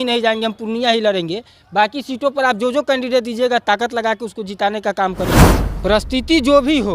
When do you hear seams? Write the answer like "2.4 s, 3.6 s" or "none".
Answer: 5.4 s